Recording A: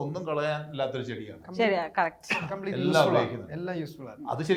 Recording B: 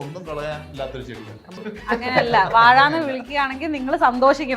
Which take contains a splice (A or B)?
B